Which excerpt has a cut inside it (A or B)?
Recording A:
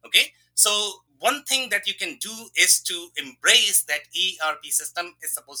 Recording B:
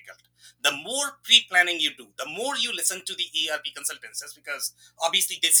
A